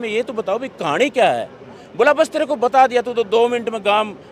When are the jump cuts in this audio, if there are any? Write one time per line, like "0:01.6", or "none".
none

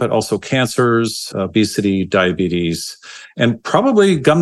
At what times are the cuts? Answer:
0:01.2

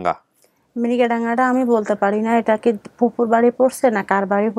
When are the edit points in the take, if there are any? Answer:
none

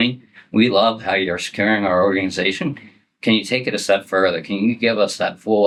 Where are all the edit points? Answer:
none

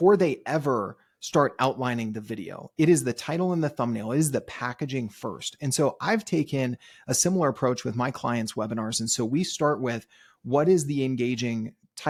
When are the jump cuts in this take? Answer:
none

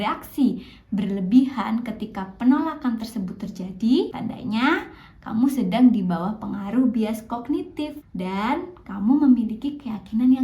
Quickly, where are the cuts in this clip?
0:04.1
0:08.0

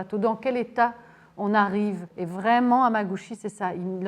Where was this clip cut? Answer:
0:02.1

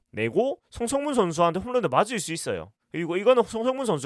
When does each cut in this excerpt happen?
none

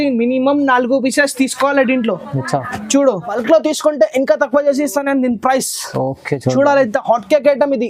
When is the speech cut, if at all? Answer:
0:03.3

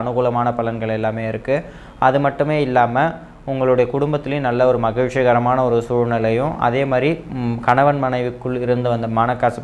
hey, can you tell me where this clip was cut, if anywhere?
none

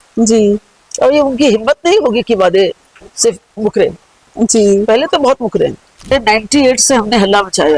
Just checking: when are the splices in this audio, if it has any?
0:06.1

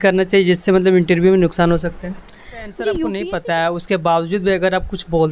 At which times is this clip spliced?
0:03.2

